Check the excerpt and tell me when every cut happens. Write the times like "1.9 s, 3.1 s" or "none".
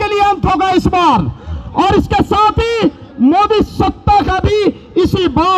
none